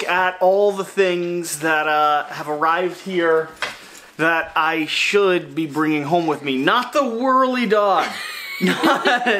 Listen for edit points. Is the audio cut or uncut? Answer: uncut